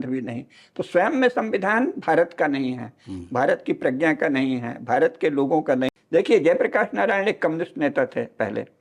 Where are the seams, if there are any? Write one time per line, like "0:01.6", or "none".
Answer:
0:06.0

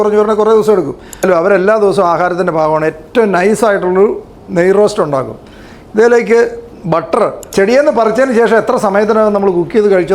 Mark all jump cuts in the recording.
0:01.2
0:07.5

